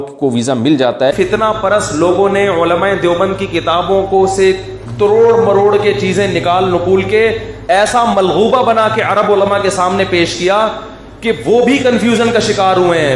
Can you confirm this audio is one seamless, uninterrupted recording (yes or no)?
no